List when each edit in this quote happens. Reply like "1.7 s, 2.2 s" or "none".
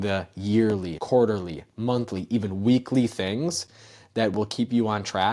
none